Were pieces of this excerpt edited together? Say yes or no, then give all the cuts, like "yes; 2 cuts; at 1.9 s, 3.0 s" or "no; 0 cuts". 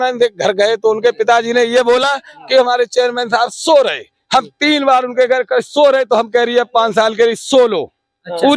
no; 0 cuts